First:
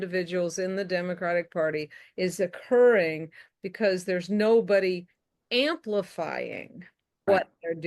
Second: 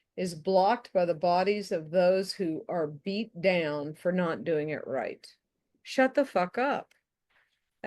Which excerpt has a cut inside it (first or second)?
second